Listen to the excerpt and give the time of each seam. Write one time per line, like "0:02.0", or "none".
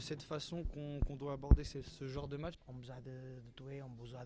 0:02.6

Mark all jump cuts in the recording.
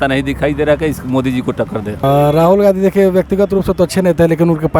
0:02.0

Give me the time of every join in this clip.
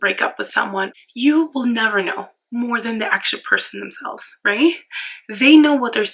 0:01.0

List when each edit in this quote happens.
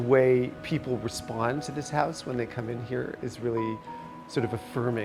none

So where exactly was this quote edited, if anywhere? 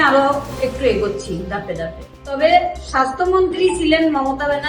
0:02.2

